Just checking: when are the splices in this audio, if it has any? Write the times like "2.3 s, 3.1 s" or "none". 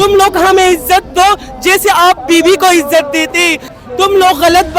3.7 s